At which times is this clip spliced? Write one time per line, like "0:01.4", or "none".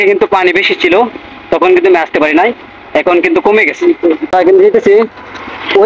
0:04.3

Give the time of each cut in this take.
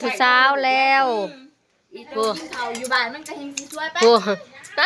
0:01.9

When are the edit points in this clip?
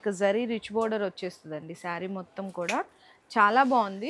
none

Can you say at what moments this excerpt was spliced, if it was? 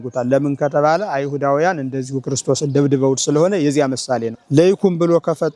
0:04.3

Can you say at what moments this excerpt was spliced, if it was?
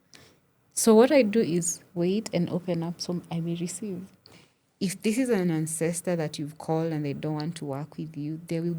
0:04.3

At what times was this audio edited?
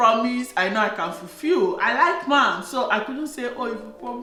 none

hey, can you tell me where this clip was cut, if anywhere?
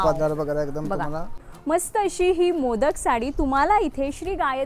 0:01.5

